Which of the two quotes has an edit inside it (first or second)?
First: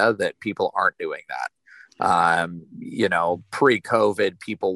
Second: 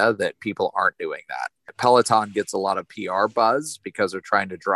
second